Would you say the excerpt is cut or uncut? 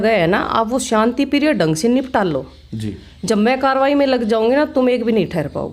uncut